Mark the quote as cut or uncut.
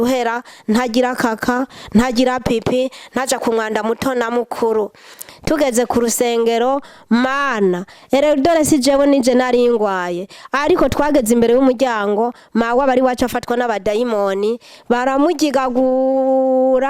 cut